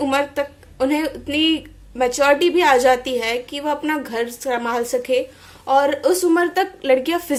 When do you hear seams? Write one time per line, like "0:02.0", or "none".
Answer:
none